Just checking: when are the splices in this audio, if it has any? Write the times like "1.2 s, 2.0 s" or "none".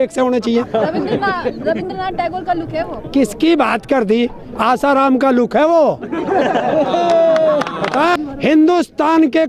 8.2 s